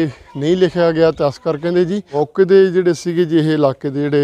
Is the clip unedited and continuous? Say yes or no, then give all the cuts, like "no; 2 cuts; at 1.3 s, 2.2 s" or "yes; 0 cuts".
no; 1 cut; at 2.1 s